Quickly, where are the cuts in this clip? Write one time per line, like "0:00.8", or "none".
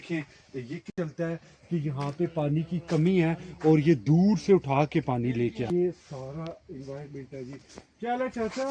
0:00.9
0:05.7